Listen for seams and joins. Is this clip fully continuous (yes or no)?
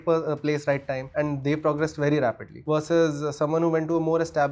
no